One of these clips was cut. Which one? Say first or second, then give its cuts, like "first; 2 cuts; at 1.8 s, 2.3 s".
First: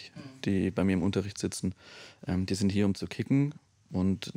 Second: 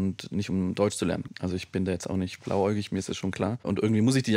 second; 2 cuts; at 1.3 s, 3.7 s